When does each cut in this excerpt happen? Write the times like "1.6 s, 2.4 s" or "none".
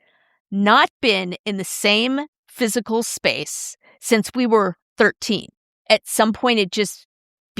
5.8 s